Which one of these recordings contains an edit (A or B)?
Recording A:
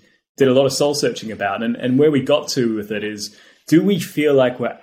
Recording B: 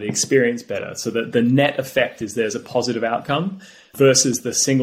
B